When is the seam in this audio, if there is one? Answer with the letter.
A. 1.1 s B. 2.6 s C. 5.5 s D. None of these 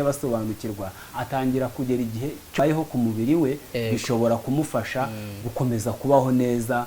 B